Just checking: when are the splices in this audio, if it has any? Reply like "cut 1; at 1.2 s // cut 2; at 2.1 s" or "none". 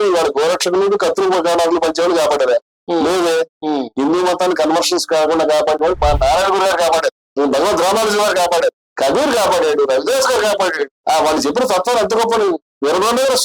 cut 1; at 7.2 s // cut 2; at 8.8 s // cut 3; at 10.9 s